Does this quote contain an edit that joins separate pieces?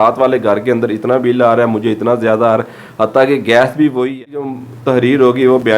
yes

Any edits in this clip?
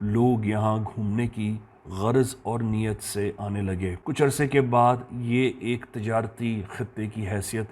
yes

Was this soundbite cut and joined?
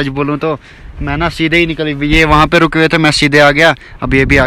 no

